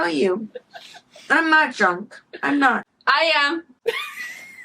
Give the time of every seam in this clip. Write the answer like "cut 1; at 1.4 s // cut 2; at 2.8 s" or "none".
none